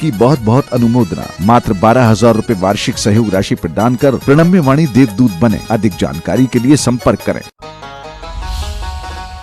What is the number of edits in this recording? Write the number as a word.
one